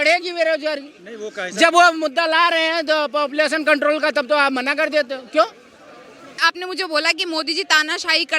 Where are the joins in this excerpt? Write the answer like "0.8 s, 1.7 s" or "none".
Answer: 6.4 s